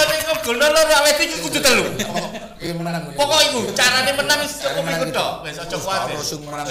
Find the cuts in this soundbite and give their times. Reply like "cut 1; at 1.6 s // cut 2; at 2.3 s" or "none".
none